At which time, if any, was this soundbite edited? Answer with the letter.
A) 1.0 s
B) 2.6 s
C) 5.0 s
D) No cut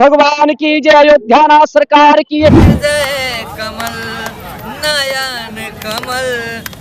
B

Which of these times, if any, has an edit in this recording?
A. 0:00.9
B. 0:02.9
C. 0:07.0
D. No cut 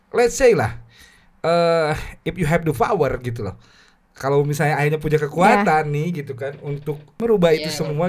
C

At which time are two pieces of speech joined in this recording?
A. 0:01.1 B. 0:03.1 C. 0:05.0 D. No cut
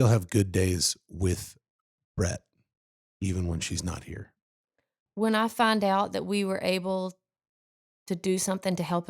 C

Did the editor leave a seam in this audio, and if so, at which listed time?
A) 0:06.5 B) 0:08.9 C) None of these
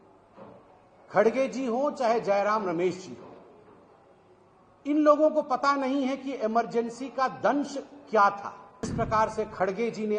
B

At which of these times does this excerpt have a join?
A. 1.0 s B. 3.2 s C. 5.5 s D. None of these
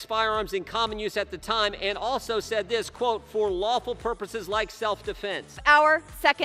C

